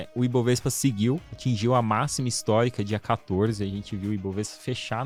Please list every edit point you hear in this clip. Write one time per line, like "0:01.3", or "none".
none